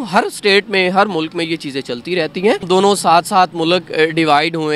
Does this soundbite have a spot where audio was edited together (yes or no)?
yes